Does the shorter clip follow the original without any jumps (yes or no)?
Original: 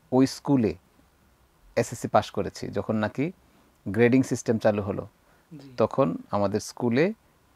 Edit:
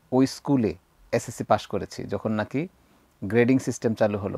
no